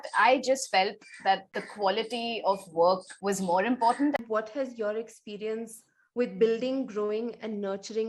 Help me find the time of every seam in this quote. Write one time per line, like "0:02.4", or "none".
0:01.6
0:03.1
0:04.2